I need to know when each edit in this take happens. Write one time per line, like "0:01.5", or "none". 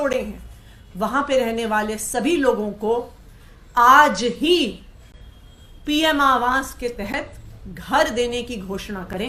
none